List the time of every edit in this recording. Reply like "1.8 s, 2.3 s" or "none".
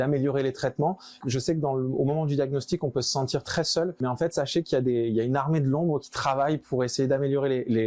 1.2 s, 4.0 s